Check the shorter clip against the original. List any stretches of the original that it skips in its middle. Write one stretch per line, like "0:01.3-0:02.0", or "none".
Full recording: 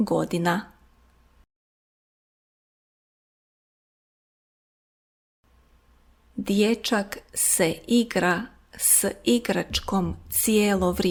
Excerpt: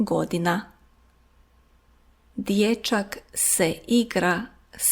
0:01.4-0:05.4